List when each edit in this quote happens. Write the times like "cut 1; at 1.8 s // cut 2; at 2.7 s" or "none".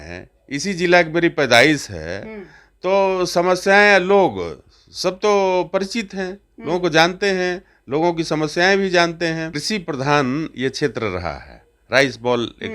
cut 1; at 9.5 s